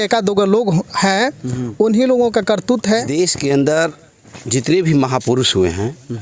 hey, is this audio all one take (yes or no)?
no